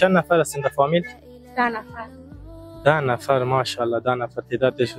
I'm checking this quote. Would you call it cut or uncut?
uncut